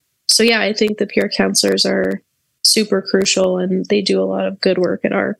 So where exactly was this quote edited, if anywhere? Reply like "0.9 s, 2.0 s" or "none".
none